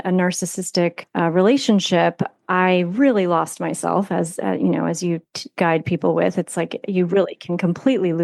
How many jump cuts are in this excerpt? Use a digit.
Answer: 1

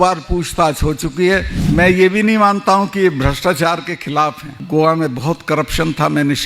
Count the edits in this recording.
2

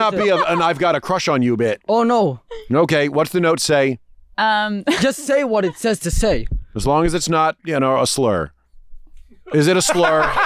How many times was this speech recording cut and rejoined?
0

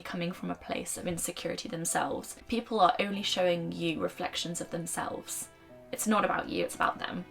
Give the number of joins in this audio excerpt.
1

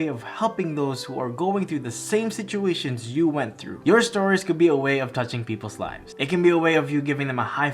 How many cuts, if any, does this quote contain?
1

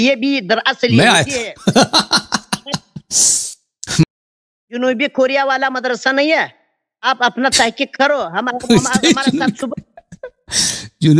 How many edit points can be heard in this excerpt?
1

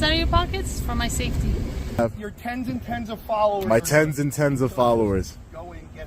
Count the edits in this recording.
1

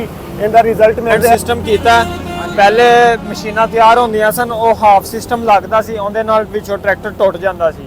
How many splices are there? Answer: 1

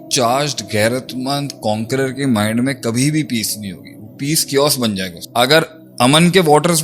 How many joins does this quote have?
1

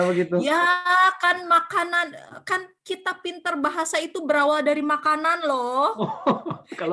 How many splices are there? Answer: 0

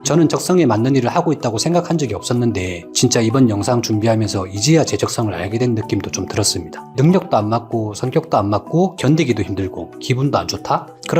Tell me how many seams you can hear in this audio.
1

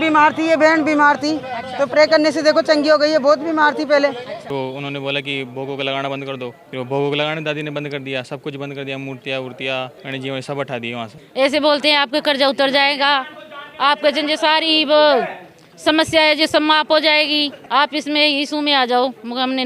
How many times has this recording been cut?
5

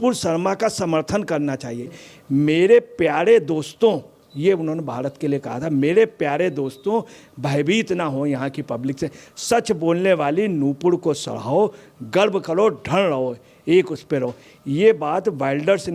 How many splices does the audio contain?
1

